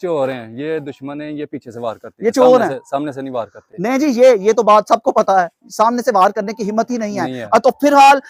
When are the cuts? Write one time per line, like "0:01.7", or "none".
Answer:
none